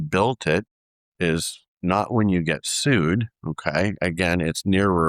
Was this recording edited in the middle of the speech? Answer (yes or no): no